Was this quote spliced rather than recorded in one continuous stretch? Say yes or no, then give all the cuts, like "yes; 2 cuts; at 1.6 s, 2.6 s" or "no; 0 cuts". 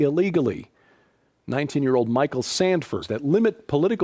no; 0 cuts